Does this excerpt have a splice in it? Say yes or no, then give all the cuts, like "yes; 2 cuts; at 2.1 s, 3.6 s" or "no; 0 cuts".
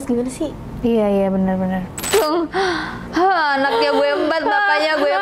yes; 1 cut; at 2.1 s